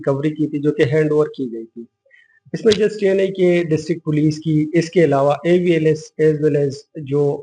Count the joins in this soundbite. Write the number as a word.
zero